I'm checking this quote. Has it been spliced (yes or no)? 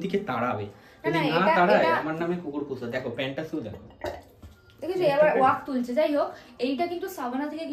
no